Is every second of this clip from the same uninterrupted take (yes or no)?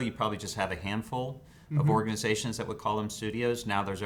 yes